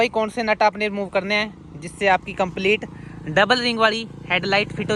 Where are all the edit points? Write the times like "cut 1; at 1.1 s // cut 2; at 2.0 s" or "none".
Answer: none